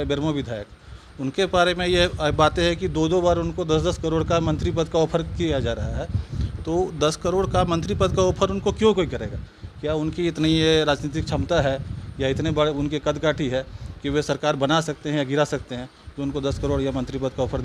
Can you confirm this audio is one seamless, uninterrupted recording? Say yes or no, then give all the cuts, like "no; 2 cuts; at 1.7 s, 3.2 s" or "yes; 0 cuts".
yes; 0 cuts